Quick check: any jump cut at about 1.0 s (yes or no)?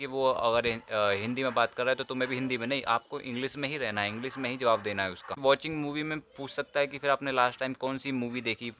no